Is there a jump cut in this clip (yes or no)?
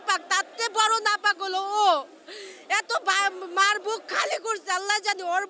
no